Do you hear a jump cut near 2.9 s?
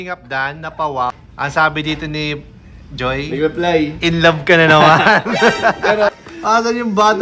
no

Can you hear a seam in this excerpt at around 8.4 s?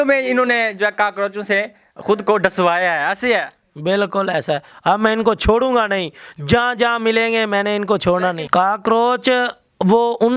yes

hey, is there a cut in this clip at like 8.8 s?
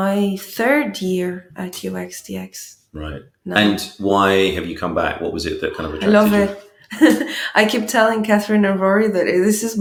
no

